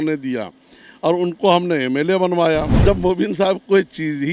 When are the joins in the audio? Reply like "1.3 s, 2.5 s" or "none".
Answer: 2.7 s